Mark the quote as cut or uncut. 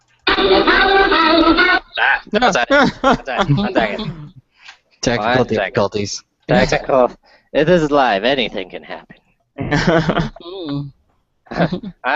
cut